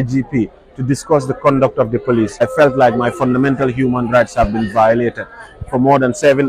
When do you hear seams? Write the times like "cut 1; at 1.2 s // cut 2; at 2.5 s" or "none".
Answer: cut 1; at 2.4 s